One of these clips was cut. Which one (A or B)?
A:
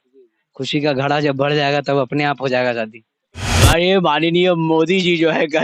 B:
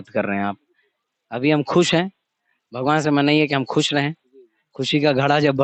A